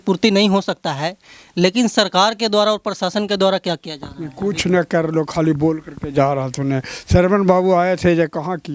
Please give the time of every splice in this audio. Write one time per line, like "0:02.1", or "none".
none